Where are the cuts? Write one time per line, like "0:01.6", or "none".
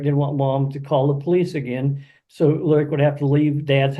0:02.9